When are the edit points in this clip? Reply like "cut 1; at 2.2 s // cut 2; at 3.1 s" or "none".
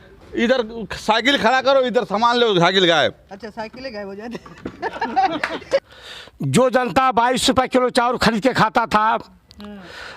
cut 1; at 5.8 s